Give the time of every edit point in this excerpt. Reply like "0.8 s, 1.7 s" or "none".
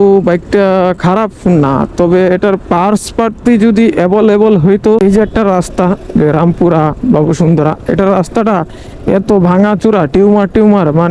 5.0 s